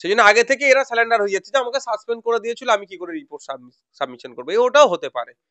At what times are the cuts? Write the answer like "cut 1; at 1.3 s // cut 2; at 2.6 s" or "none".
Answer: none